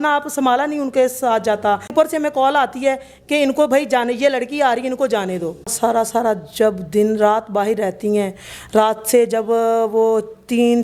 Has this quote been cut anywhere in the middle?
yes; 2 cuts; at 1.9 s, 5.7 s

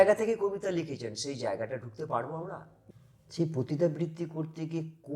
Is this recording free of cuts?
no; 1 cut; at 2.7 s

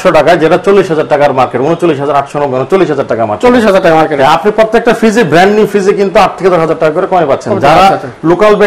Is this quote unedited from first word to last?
yes; 0 cuts

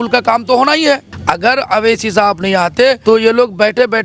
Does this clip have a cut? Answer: yes; 2 cuts; at 1.1 s, 3.0 s

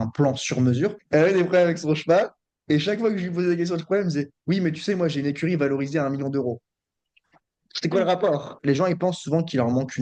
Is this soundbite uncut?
no; 2 cuts; at 1.0 s, 8.5 s

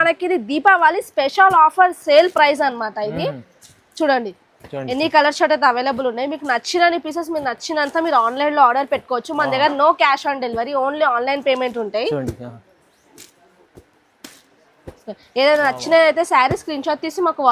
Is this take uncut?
yes; 0 cuts

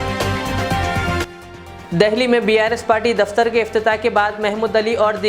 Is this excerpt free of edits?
no; 1 cut; at 1.2 s

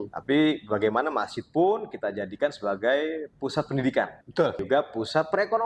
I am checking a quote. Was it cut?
yes; 1 cut; at 4.6 s

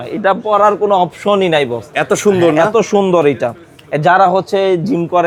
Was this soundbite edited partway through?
no; 0 cuts

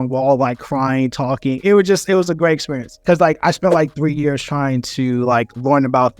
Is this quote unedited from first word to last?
yes; 0 cuts

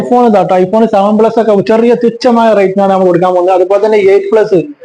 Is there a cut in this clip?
no; 0 cuts

